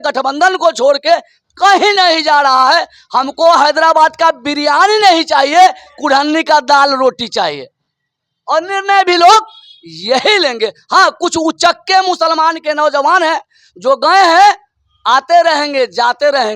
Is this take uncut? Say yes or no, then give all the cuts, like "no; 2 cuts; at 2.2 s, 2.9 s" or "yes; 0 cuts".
yes; 0 cuts